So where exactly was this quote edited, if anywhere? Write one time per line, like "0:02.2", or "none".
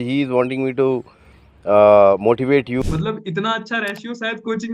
0:02.9